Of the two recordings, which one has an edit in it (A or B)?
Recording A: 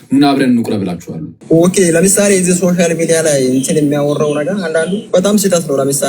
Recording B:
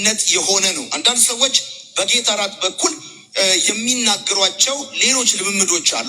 A